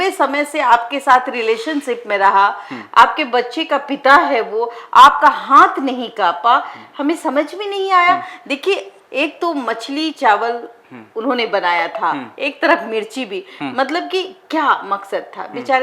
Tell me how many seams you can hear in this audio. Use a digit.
0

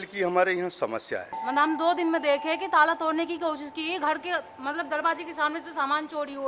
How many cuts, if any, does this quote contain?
1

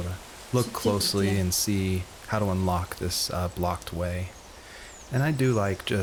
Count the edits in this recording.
0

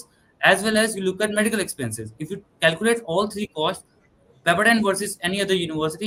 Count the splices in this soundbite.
0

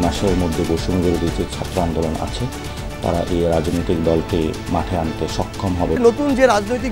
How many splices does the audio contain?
1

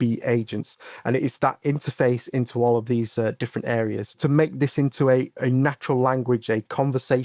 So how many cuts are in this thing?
2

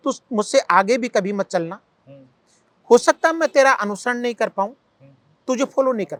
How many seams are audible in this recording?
0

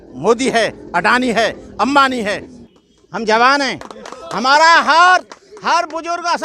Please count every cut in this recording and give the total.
1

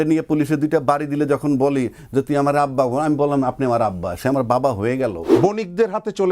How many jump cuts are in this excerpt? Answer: 1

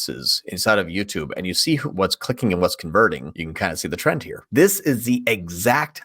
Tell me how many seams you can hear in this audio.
3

